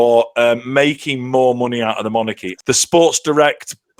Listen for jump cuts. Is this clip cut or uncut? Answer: cut